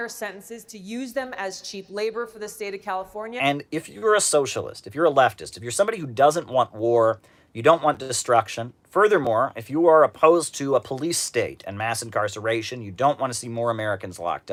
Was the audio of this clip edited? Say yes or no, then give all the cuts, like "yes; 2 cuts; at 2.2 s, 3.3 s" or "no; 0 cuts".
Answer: no; 0 cuts